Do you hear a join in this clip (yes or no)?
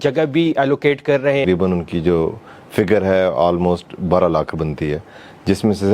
yes